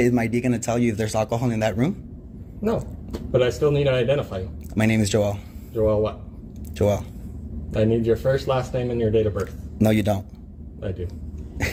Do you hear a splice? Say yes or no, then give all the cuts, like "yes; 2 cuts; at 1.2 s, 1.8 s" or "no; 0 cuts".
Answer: no; 0 cuts